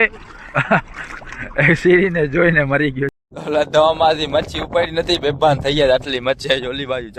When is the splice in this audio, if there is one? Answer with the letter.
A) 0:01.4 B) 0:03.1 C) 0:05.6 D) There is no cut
B